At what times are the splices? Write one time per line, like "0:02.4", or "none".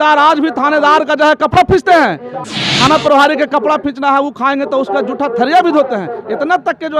0:02.4